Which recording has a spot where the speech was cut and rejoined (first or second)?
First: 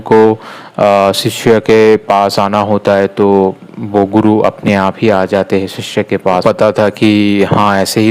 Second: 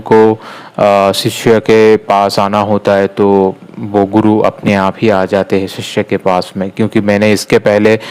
first